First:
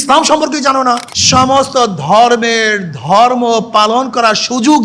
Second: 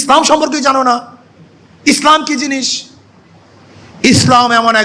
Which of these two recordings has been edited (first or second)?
first